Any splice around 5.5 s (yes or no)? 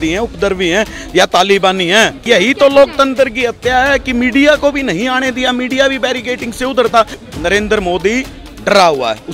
no